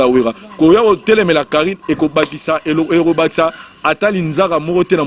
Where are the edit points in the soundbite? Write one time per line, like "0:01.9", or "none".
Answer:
none

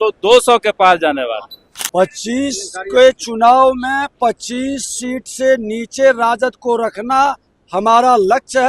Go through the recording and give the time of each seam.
0:01.6

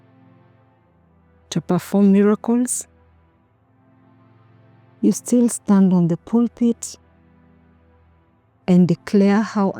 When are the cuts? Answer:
none

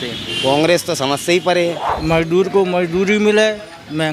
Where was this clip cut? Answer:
0:01.9

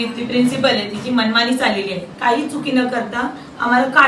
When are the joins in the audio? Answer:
0:02.1

